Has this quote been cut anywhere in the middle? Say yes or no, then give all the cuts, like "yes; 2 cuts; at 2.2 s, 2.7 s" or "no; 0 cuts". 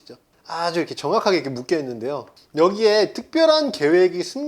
yes; 1 cut; at 2.3 s